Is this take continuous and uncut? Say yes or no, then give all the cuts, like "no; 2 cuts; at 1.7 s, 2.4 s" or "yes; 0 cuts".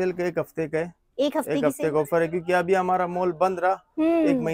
yes; 0 cuts